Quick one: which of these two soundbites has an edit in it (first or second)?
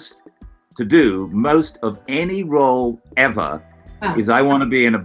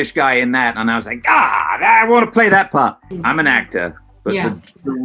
second